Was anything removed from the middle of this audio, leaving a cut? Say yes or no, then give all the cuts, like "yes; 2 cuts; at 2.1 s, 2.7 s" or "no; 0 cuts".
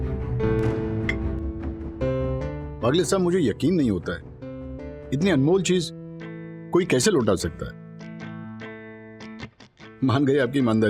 no; 0 cuts